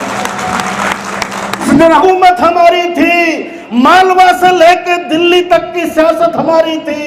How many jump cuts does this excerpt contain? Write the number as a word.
one